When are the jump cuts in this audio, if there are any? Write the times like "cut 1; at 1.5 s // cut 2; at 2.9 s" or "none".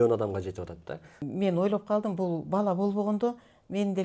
cut 1; at 1.2 s